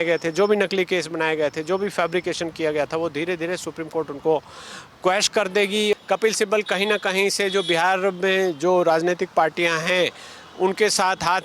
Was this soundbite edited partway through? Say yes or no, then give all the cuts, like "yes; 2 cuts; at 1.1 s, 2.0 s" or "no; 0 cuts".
yes; 1 cut; at 5.9 s